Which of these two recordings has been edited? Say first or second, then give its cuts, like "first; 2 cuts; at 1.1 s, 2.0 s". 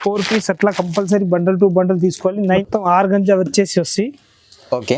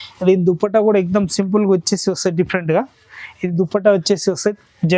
first; 1 cut; at 2.6 s